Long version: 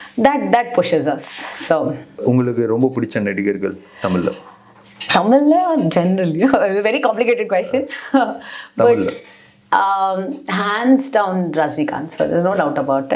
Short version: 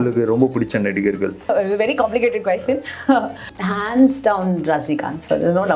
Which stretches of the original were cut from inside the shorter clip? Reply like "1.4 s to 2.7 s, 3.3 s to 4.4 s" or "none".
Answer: 3.9 s to 6.6 s, 8.6 s to 10.4 s